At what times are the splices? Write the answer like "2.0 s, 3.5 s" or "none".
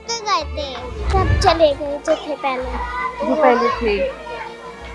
0.9 s